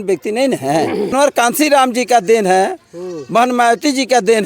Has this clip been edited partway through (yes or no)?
yes